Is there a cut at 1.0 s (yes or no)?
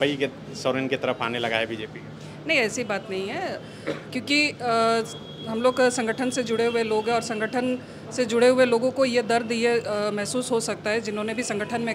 no